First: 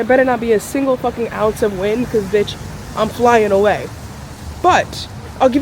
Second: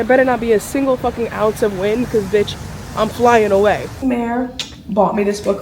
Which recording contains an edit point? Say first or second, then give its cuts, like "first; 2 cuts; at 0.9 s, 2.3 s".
second; 1 cut; at 3.9 s